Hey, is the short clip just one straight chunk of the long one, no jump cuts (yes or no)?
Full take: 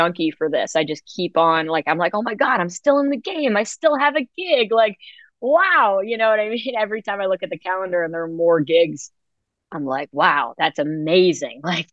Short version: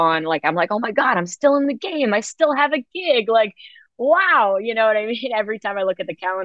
yes